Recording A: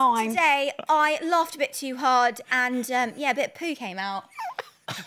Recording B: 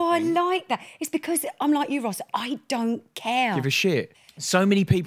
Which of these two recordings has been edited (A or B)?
B